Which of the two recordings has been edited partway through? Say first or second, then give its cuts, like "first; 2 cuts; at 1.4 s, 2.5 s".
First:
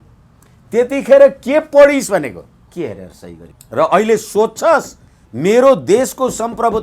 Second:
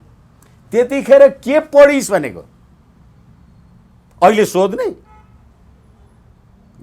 first; 2 cuts; at 2.6 s, 3.5 s